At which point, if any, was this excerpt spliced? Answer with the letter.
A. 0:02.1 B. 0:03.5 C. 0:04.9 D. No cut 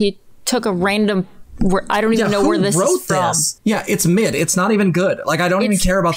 B